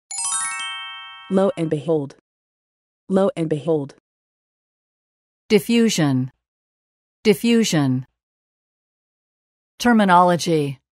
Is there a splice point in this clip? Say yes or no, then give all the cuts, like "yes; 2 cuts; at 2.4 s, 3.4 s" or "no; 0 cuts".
yes; 1 cut; at 1.2 s